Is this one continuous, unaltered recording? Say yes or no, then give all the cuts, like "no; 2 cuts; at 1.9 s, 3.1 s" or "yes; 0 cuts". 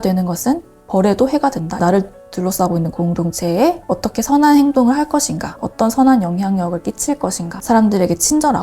no; 2 cuts; at 1.7 s, 7.6 s